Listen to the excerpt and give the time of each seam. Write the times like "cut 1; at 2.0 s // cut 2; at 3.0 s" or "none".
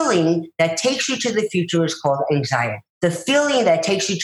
cut 1; at 2.8 s